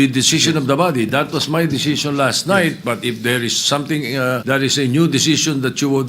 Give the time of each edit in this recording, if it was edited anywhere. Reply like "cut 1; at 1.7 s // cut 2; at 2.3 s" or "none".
cut 1; at 4.4 s